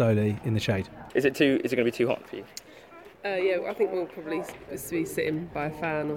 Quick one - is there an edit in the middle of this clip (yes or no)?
no